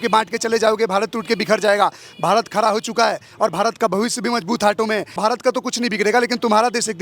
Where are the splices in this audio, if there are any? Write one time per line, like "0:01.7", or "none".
0:05.2